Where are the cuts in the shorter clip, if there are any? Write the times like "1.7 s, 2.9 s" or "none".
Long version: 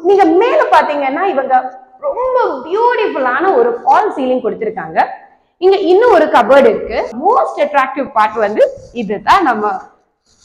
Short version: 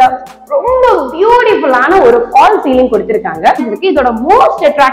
3.9 s